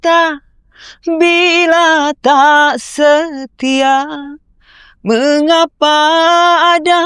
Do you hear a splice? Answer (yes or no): no